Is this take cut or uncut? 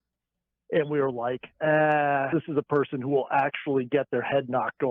cut